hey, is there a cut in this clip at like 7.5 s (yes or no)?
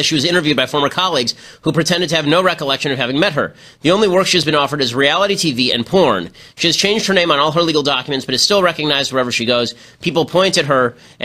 yes